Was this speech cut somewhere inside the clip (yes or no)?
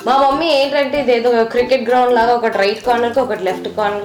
no